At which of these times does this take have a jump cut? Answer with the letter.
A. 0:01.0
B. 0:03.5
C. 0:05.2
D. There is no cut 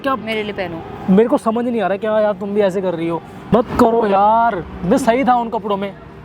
B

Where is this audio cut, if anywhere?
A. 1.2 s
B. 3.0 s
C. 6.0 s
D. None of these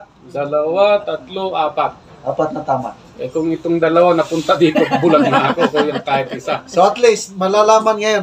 D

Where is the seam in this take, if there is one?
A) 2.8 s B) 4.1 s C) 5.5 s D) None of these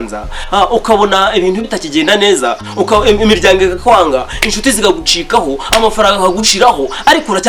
D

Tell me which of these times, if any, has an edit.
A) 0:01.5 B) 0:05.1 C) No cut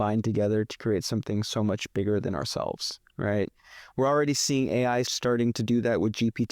B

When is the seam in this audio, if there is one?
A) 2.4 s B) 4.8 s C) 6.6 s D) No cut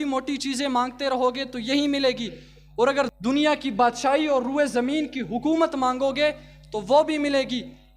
D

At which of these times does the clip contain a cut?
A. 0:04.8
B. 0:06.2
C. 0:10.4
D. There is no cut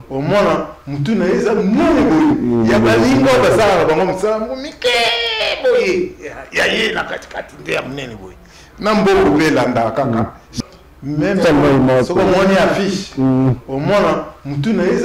C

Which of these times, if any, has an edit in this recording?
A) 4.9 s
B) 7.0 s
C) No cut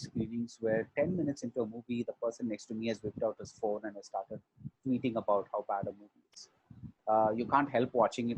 C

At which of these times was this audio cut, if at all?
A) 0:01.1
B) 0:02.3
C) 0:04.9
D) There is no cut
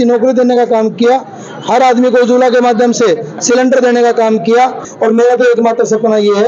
C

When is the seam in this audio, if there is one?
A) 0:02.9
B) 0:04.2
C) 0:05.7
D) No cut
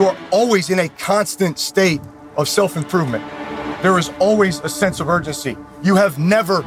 D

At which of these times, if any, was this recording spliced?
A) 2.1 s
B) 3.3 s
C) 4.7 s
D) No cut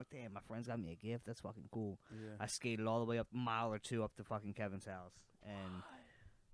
B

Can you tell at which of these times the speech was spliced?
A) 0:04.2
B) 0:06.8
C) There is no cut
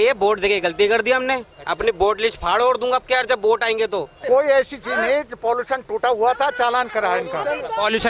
A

